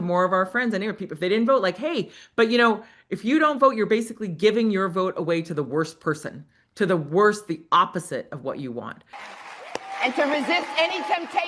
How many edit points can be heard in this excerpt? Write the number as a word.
one